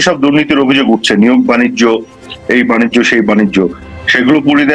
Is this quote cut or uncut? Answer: uncut